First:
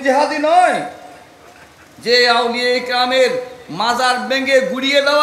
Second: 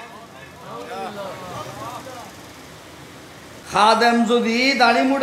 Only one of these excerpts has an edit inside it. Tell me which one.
second; 1 cut; at 3.6 s

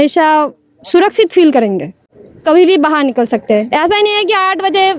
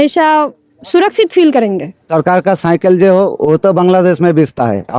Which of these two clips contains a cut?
second; 1 cut; at 2.0 s

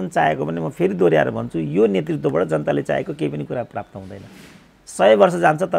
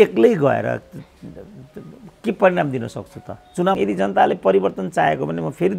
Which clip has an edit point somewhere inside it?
second; 1 cut; at 3.8 s

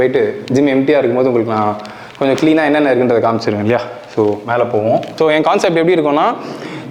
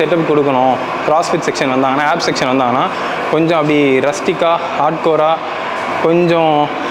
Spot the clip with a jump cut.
first; 1 cut; at 5.1 s

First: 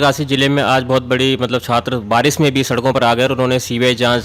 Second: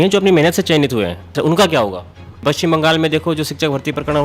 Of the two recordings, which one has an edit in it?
second; 2 cuts; at 1.3 s, 2.4 s

